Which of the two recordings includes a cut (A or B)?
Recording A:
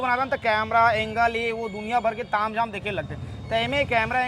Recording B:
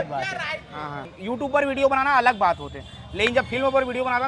B